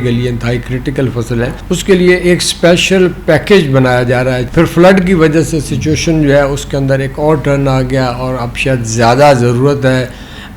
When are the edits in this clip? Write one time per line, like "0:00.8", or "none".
0:01.6
0:04.4